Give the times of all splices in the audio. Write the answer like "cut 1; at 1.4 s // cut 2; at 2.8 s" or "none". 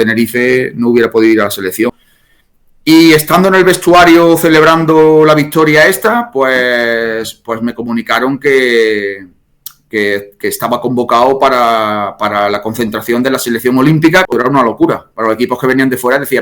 cut 1; at 1.9 s // cut 2; at 14.3 s

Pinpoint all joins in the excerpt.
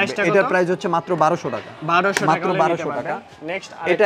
none

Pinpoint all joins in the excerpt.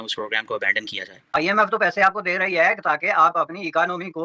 cut 1; at 1.3 s

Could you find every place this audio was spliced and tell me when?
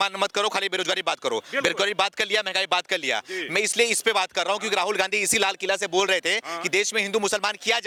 none

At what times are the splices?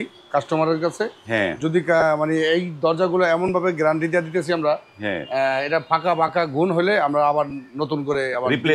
none

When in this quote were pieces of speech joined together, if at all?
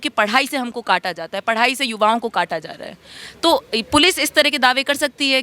none

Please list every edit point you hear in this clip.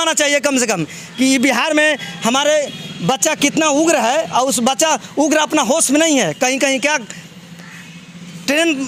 none

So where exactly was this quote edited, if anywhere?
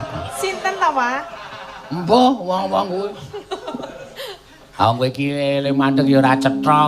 cut 1; at 2.0 s

